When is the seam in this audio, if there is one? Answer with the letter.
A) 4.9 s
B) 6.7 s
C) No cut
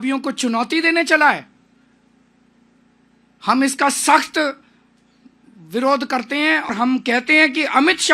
B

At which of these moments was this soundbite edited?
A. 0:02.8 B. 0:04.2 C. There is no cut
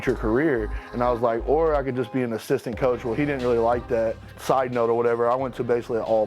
B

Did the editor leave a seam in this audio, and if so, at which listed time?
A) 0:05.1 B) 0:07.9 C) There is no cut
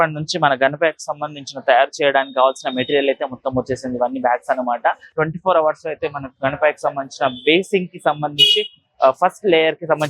A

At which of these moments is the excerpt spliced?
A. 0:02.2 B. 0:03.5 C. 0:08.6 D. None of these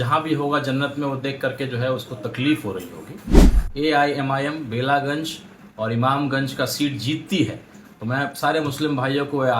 B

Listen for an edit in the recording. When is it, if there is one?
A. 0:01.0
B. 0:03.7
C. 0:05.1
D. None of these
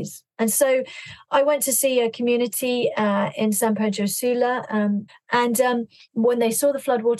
C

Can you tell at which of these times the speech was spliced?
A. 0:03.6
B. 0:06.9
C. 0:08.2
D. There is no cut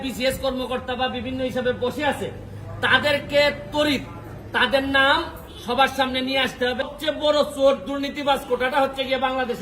B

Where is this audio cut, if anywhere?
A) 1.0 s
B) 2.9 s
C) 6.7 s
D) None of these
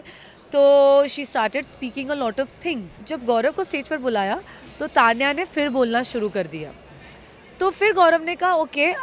B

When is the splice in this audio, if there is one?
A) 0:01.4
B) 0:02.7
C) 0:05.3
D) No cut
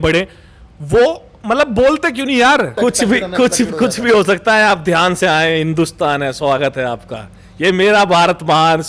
B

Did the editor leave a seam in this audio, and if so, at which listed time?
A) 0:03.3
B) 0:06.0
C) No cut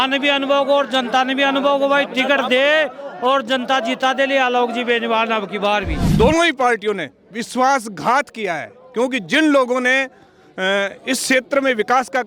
B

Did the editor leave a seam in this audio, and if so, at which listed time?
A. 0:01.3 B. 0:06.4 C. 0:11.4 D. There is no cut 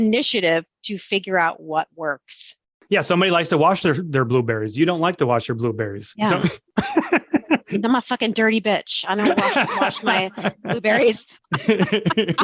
C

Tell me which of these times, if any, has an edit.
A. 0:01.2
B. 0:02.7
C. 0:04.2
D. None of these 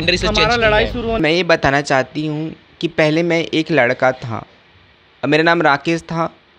A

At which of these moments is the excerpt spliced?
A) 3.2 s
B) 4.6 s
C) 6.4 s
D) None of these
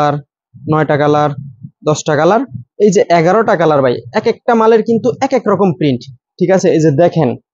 D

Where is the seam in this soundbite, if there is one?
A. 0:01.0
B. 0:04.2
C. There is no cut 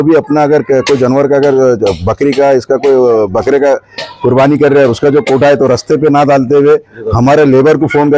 C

